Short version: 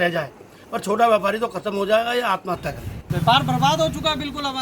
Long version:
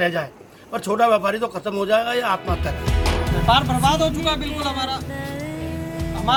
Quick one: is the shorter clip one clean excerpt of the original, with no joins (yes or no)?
no